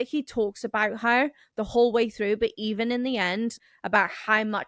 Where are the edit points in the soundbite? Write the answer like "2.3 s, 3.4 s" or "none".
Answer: 3.5 s